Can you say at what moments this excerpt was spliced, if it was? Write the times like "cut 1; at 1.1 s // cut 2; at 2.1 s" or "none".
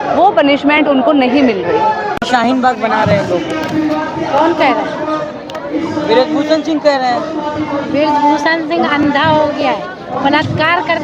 none